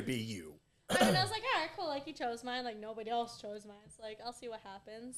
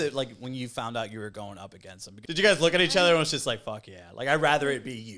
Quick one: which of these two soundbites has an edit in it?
second; 1 cut; at 2.1 s

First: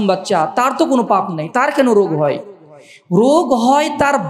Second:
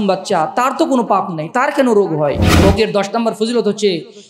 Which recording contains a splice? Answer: second; 1 cut; at 2.5 s

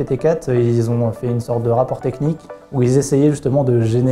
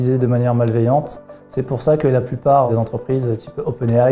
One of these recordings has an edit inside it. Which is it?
second; 1 cut; at 2.7 s

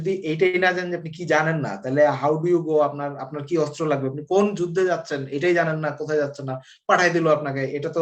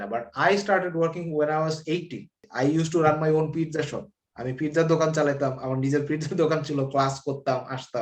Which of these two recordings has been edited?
second; 1 cut; at 2.4 s

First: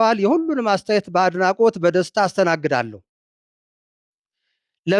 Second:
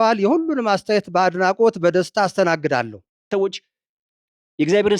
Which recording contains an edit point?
second; 1 cut; at 3.3 s

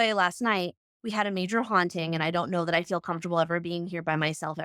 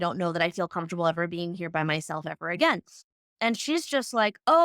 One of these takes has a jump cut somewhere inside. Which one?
second; 1 cut; at 3.3 s

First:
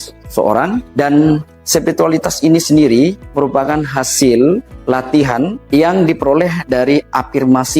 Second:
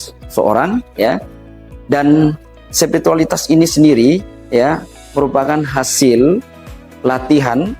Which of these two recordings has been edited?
first; 4 cuts; at 0.9 s, 1.5 s, 3.2 s, 5.3 s

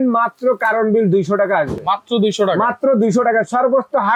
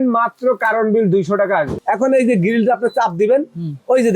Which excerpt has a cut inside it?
second; 1 cut; at 1.7 s

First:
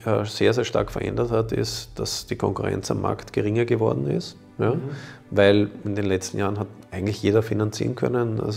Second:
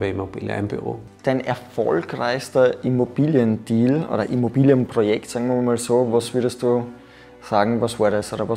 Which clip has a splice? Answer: second; 1 cut; at 1.1 s

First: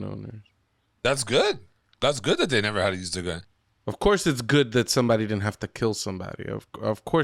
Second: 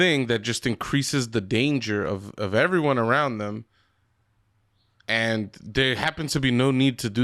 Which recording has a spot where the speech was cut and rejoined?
first; 1 cut; at 3.5 s

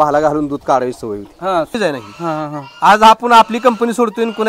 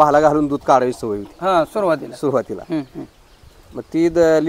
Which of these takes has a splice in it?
first; 1 cut; at 1.7 s

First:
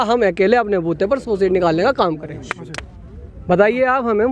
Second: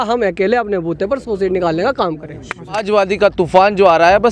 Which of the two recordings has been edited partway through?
second; 1 cut; at 2.8 s

